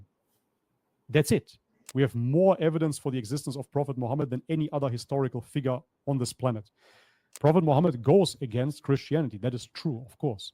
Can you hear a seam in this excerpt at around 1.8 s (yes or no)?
yes